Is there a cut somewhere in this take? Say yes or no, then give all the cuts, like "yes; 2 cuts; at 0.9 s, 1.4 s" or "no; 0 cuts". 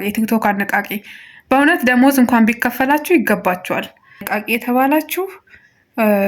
yes; 1 cut; at 4.3 s